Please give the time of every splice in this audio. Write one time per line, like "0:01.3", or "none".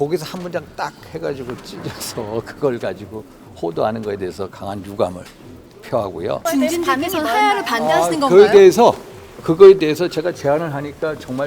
0:06.4